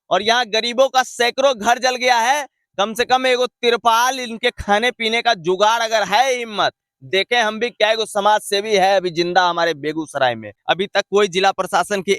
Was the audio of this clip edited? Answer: yes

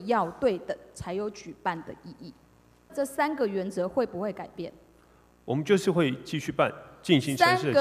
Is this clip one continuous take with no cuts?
no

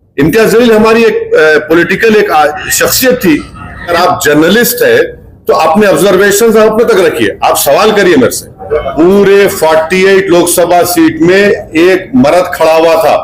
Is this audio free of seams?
no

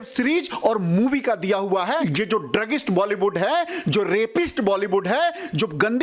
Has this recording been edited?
yes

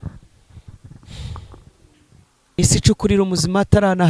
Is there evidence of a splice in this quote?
yes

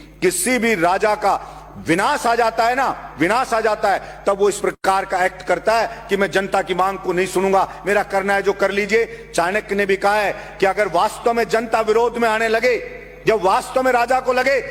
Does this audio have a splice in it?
no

